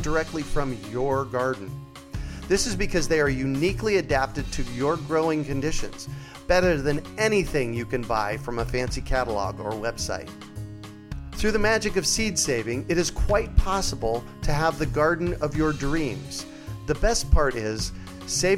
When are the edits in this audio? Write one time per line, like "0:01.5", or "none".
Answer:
none